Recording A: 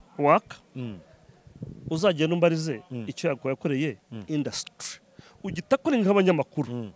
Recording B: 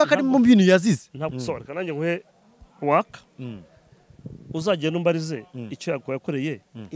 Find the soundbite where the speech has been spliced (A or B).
B